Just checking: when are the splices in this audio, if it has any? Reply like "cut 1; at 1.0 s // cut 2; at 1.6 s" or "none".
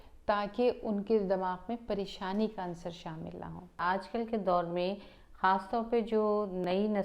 cut 1; at 3.8 s